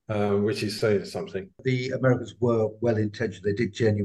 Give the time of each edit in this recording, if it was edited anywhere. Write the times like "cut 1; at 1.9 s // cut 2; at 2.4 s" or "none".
cut 1; at 1.6 s